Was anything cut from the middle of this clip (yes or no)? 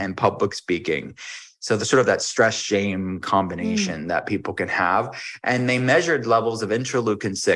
no